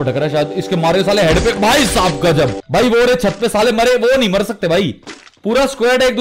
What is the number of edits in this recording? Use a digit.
1